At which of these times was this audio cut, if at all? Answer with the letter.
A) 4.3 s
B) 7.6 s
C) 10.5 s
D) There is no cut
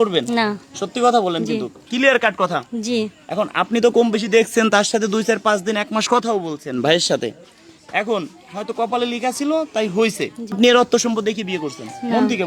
C